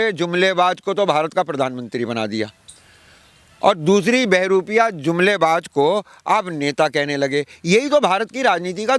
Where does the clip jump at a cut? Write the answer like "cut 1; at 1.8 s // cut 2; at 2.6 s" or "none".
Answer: none